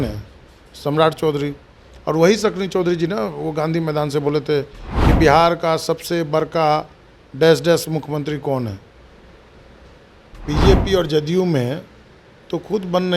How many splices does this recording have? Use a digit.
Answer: 1